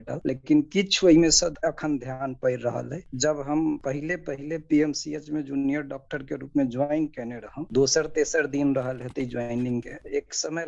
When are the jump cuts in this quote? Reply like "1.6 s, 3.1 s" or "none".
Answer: 1.5 s, 3.0 s